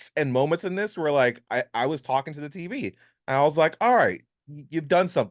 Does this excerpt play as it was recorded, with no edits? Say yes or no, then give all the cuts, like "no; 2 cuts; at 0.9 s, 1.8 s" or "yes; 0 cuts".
yes; 0 cuts